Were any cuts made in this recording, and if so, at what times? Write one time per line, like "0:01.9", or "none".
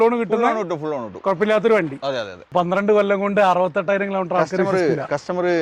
0:02.4